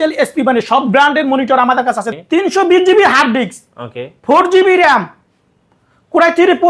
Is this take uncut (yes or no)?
no